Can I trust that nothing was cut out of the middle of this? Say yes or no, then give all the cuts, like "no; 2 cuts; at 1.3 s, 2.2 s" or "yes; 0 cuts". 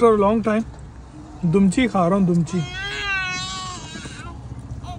yes; 0 cuts